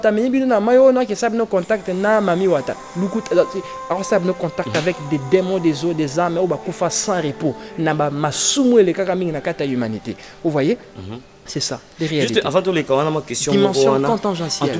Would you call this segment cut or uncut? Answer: uncut